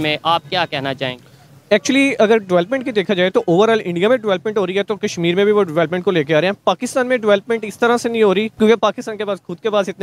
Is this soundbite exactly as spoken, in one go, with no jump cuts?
no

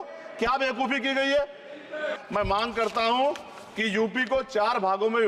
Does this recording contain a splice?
yes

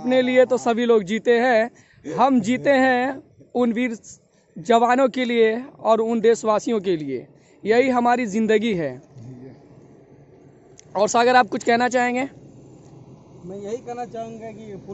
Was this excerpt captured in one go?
yes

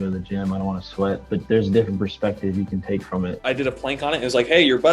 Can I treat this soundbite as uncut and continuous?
no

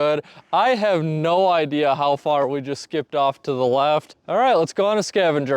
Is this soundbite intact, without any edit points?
no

